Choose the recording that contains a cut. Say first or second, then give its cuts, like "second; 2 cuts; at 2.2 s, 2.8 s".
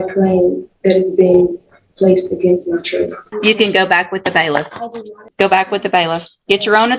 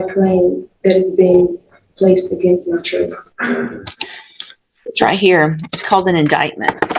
first; 2 cuts; at 3.2 s, 5.2 s